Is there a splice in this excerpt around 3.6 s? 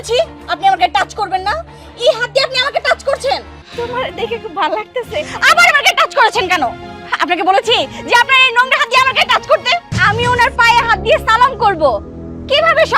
yes; 2 cuts; at 3.6 s, 9.9 s

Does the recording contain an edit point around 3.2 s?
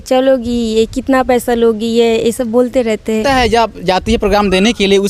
yes; 1 cut; at 3.2 s

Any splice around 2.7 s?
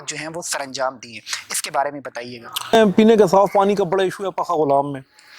yes; 1 cut; at 2.7 s

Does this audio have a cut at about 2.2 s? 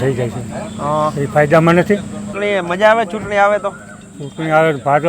yes; 1 cut; at 2.2 s

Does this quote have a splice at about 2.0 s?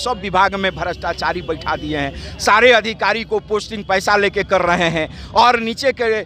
no; 0 cuts

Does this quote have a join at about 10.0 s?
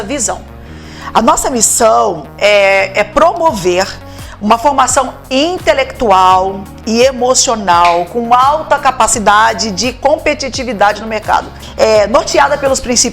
no; 1 cut; at 11.6 s

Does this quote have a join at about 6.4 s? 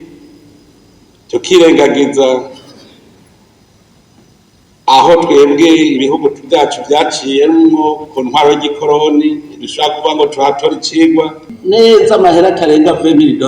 no; 1 cut; at 11.5 s

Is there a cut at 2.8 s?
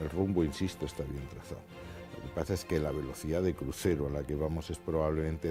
no; 0 cuts

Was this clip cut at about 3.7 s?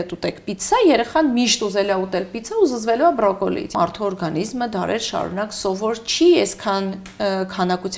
yes; 1 cut; at 3.7 s

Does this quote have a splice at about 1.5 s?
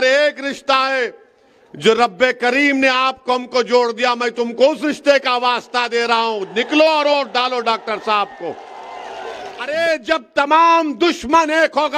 no; 1 cut; at 9.7 s

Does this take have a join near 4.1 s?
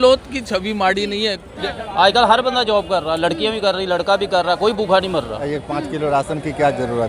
no; 2 cuts; at 1.6 s, 5.4 s

